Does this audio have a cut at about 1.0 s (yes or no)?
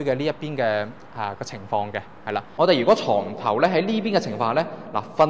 no